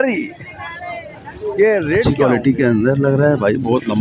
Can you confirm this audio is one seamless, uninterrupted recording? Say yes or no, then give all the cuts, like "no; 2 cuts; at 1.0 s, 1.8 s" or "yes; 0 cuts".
no; 1 cut; at 2.0 s